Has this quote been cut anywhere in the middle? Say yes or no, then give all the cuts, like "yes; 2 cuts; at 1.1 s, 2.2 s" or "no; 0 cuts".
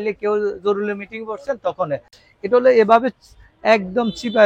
no; 0 cuts